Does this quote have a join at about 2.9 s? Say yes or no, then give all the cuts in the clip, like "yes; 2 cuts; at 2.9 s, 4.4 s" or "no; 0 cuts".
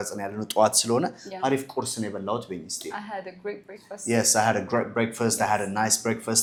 no; 0 cuts